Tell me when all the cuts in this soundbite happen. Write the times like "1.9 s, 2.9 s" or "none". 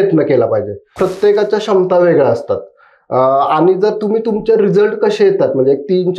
0.9 s